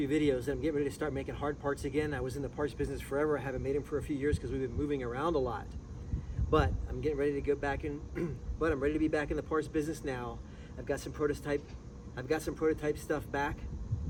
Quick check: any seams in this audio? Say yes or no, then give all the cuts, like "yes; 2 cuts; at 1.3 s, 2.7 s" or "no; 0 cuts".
no; 0 cuts